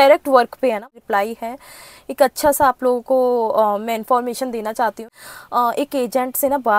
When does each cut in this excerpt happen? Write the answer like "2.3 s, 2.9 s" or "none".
0.9 s, 5.1 s